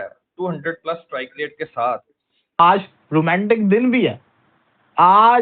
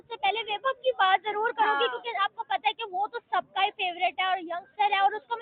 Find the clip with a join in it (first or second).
first